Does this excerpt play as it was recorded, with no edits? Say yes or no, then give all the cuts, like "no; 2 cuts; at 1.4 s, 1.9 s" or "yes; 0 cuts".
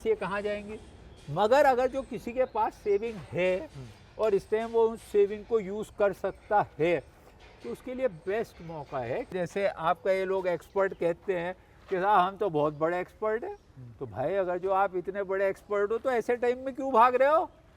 no; 1 cut; at 9.3 s